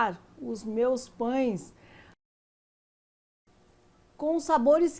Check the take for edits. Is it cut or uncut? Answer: uncut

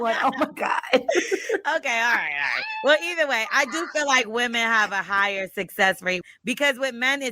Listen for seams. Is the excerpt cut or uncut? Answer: cut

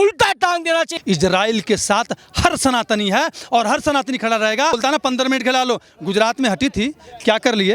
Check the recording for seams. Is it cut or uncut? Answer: cut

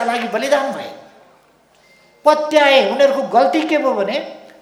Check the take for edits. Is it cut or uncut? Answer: uncut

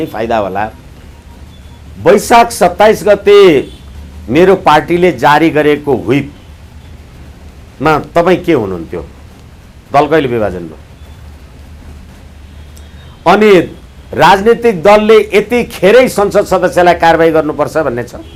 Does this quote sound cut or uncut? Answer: uncut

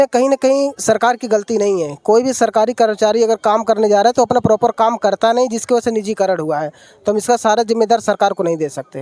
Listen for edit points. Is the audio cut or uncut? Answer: uncut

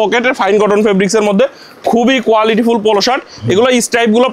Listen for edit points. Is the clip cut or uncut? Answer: uncut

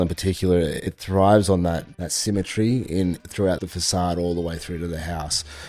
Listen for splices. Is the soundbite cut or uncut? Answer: cut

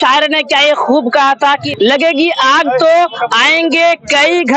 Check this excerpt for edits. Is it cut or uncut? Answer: cut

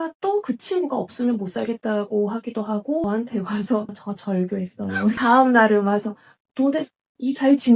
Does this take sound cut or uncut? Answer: cut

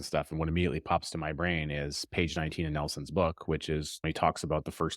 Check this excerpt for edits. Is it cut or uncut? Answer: cut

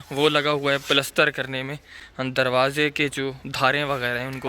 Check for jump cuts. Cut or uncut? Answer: uncut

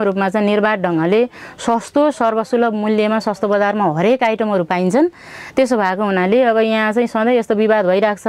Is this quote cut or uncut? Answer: uncut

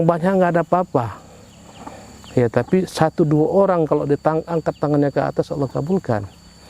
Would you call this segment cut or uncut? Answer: uncut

